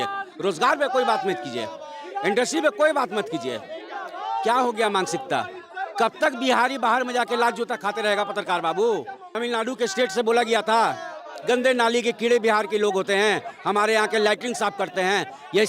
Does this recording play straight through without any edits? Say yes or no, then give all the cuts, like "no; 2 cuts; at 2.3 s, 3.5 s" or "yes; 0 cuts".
no; 1 cut; at 9.3 s